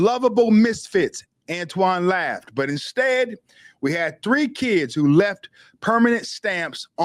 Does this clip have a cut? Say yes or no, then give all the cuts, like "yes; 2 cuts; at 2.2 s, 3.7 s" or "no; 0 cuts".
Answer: no; 0 cuts